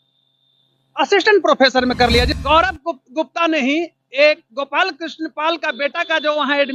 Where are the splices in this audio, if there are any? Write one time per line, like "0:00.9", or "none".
0:02.3